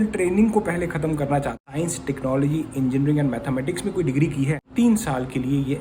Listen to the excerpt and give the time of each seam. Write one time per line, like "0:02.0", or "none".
0:01.6
0:04.6